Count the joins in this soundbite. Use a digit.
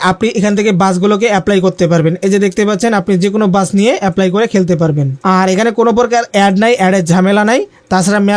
1